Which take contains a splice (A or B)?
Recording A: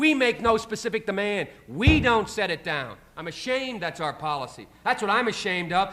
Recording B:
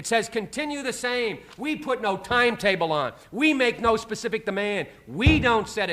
B